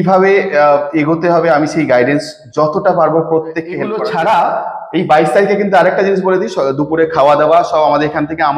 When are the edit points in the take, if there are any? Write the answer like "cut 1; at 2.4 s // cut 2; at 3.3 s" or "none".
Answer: cut 1; at 3.9 s